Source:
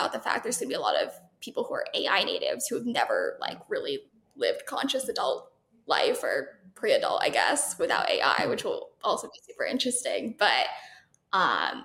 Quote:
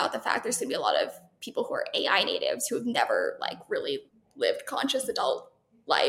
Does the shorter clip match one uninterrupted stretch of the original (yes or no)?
yes